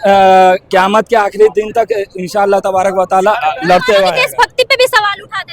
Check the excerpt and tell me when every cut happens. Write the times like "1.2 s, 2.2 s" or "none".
4.1 s